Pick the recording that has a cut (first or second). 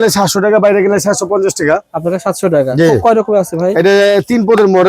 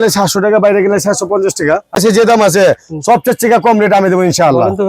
second